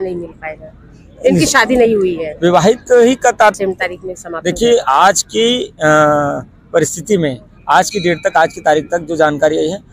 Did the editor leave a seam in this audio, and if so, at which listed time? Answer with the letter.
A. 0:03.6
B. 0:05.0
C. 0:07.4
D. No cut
A